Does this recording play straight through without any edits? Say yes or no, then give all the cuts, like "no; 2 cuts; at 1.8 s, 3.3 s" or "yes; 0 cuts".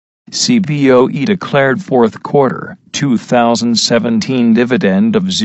yes; 0 cuts